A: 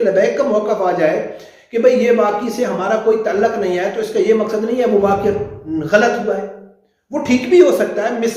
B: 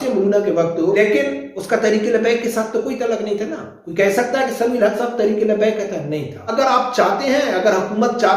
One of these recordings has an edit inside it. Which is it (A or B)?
B